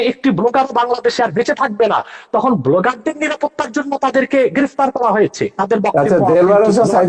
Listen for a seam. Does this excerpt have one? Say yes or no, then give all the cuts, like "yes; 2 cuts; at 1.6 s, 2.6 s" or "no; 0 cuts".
yes; 1 cut; at 5.5 s